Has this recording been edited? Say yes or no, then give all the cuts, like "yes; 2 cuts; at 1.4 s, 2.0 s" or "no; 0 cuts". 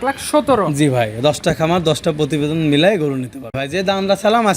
yes; 1 cut; at 3.6 s